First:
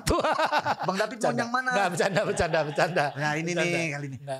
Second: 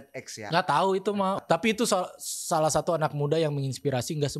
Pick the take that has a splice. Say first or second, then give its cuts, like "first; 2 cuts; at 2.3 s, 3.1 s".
second; 1 cut; at 1.4 s